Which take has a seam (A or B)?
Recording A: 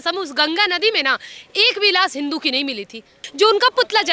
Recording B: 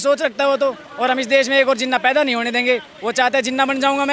A